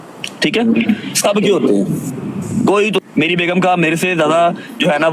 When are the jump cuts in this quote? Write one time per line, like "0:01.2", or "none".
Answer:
0:03.0